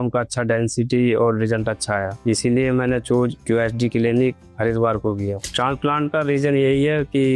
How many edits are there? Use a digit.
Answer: 0